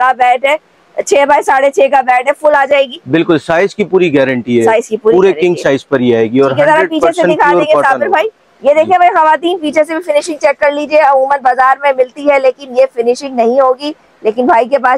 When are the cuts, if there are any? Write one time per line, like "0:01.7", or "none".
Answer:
none